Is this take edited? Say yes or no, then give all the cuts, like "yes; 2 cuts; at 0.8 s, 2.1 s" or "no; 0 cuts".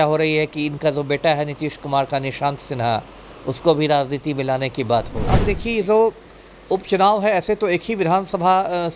yes; 1 cut; at 5.4 s